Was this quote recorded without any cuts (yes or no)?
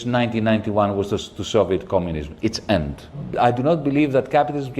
no